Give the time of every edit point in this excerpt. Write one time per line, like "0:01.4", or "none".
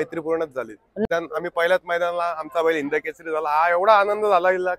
0:01.0